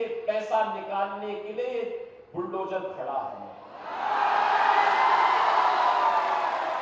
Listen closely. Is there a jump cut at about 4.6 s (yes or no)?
no